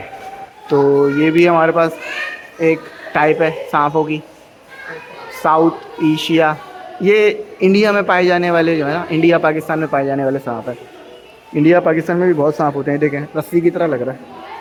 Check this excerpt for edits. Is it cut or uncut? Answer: uncut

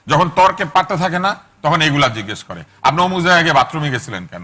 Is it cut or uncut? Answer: uncut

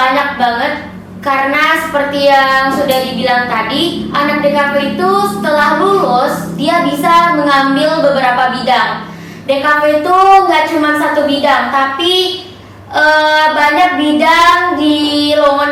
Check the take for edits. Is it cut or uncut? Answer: uncut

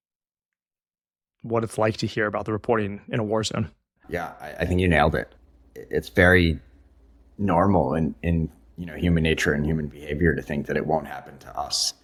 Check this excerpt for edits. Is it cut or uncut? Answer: uncut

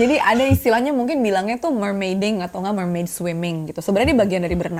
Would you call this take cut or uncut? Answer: uncut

